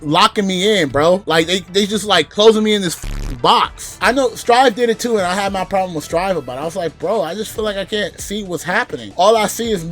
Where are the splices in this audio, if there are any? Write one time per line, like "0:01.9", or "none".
0:03.9
0:09.0